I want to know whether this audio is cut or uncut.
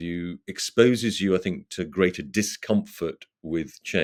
uncut